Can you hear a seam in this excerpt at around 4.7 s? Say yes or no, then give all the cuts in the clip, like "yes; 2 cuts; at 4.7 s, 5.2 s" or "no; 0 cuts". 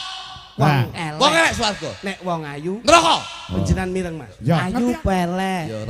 yes; 1 cut; at 4.7 s